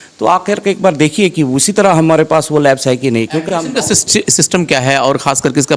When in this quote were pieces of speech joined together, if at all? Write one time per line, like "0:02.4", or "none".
none